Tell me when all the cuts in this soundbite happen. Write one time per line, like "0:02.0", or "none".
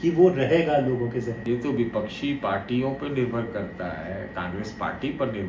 0:01.4